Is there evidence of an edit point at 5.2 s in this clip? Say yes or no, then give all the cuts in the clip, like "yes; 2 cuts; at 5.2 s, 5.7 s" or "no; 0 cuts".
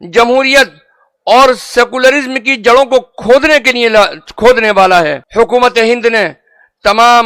yes; 1 cut; at 5.2 s